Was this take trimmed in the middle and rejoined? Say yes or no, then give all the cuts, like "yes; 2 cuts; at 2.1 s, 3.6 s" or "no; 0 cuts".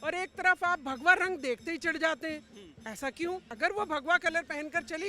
yes; 1 cut; at 3.5 s